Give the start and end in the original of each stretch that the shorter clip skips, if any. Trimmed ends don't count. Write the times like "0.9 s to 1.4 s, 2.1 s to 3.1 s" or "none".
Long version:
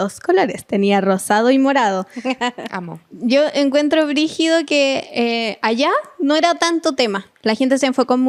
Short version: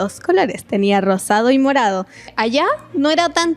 2.2 s to 5.5 s